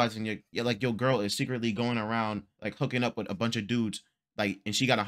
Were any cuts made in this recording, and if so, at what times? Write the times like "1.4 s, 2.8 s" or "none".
none